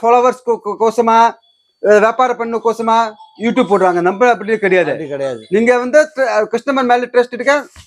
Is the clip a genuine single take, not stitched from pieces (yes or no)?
yes